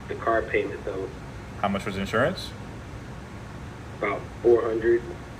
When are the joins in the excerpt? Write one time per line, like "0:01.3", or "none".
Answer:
none

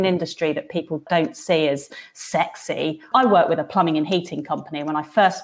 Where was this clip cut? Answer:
0:01.0
0:03.0

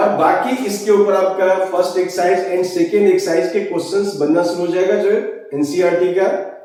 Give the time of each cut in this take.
none

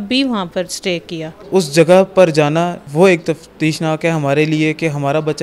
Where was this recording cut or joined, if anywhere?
0:01.4
0:02.8

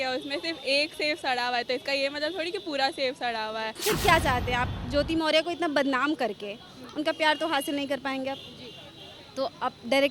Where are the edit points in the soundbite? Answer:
0:03.8

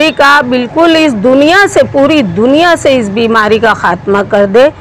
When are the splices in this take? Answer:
none

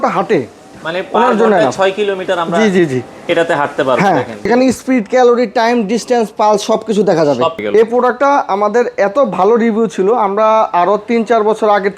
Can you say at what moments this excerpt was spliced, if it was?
0:04.4
0:07.6

